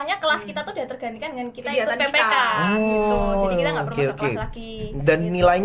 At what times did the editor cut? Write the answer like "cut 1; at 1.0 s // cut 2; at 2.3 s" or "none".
none